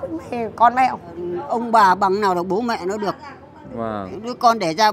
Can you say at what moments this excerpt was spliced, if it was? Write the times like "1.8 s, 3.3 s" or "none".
1.3 s